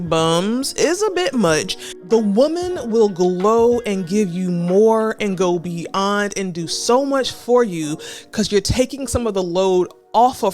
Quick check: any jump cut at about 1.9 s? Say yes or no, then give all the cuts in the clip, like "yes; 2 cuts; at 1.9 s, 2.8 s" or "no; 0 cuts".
yes; 1 cut; at 1.9 s